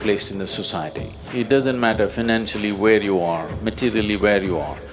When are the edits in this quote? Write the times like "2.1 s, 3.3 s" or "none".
none